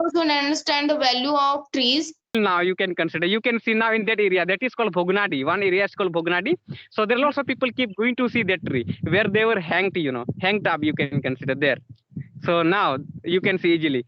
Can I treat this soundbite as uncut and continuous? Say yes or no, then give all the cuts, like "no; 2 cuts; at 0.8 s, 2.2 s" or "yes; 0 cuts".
no; 1 cut; at 2.3 s